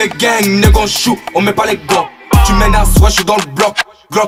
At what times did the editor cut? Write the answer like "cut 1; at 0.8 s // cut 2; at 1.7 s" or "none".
none